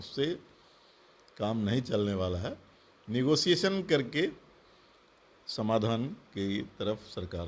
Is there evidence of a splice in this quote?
no; 0 cuts

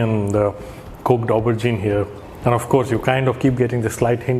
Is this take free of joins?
no; 1 cut; at 2.2 s

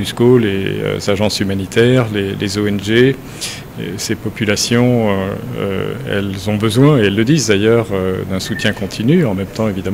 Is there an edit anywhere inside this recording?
no; 0 cuts

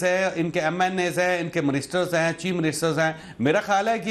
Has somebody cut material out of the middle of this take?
no; 0 cuts

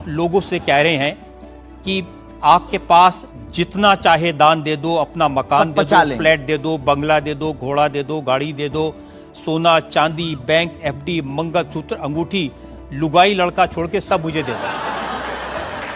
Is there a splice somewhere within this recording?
no; 0 cuts

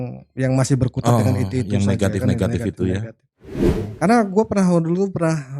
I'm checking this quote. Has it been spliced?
yes; 1 cut; at 3.8 s

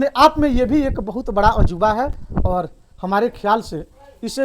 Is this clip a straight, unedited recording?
yes; 0 cuts

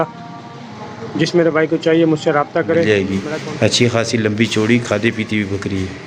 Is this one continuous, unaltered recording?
no; 1 cut; at 2.9 s

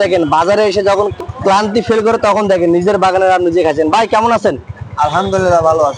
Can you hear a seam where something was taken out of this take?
yes; 1 cut; at 1.2 s

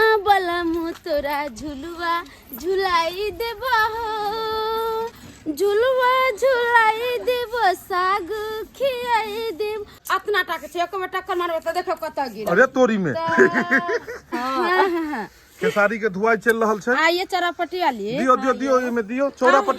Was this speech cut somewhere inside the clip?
yes; 3 cuts; at 5.2 s, 9.9 s, 14.3 s

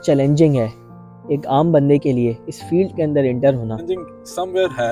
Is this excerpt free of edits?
no; 1 cut; at 3.8 s

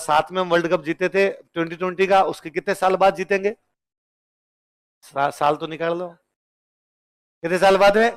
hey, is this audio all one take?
yes; 0 cuts

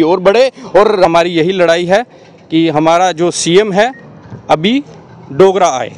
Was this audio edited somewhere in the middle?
yes; 1 cut; at 1.1 s

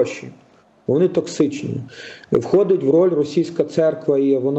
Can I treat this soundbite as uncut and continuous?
yes; 0 cuts

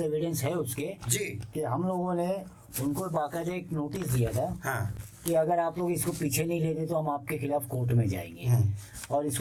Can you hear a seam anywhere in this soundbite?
no; 0 cuts

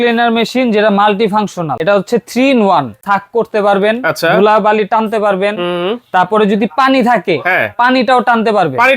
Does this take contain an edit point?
yes; 2 cuts; at 1.7 s, 3.0 s

